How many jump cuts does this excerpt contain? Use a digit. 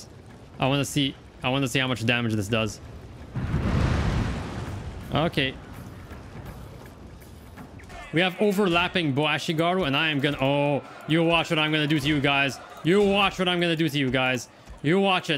1